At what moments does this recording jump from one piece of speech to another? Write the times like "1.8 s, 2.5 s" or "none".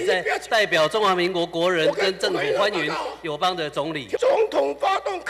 4.2 s